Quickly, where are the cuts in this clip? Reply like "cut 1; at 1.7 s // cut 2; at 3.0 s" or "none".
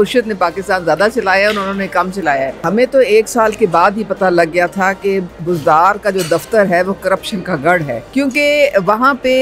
cut 1; at 2.6 s

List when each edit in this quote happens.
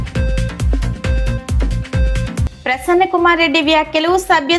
cut 1; at 1.1 s

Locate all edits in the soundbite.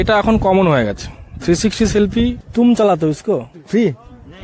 cut 1; at 2.4 s // cut 2; at 3.5 s

